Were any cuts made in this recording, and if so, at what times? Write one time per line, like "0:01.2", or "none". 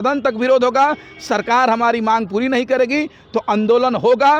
none